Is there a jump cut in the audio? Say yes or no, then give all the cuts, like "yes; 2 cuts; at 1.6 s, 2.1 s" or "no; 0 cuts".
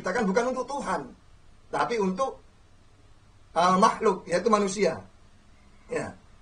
no; 0 cuts